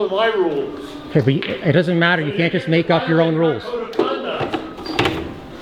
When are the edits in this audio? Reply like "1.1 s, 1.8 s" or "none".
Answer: none